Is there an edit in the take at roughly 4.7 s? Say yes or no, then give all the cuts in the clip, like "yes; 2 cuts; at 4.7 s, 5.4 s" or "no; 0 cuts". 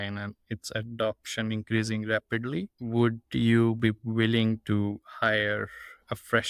no; 1 cut; at 2.8 s